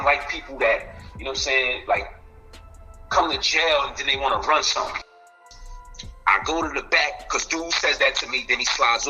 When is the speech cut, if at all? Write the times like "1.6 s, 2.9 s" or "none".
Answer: 5.0 s